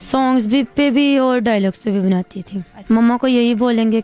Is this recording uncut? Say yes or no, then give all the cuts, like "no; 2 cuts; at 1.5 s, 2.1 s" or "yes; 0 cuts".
no; 1 cut; at 2.7 s